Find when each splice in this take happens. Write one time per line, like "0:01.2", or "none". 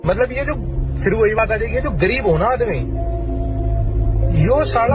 none